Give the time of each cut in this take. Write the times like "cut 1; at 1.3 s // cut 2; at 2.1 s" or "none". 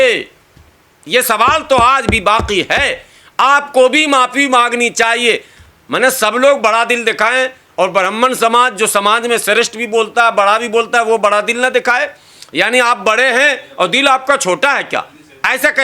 none